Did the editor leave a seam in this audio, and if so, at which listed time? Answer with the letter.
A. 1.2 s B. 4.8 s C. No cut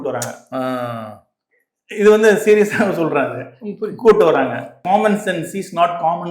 B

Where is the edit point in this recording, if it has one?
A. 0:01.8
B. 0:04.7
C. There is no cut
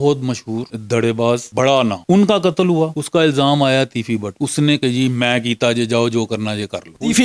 B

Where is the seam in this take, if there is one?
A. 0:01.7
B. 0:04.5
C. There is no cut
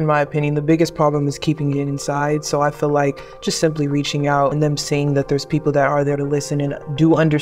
B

